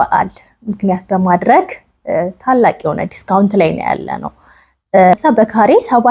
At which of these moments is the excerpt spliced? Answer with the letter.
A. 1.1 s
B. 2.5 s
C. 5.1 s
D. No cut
C